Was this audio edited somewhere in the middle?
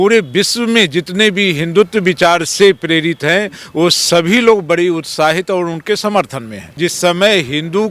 yes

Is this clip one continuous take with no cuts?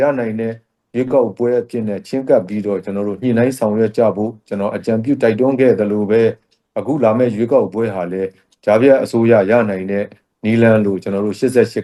yes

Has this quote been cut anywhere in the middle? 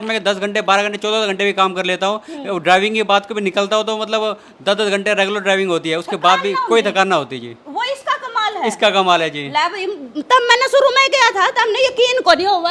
no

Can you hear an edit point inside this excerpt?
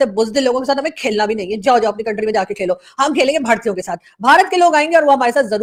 no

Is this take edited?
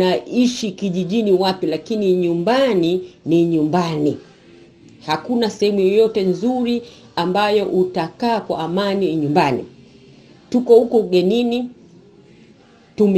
no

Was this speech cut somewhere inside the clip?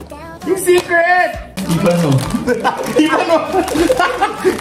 yes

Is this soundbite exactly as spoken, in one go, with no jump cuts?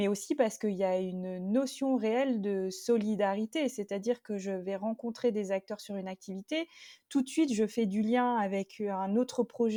yes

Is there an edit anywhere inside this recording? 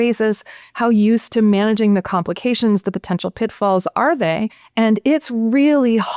yes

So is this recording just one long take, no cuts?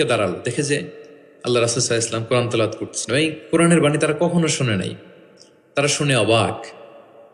yes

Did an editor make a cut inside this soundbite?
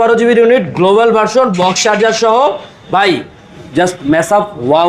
no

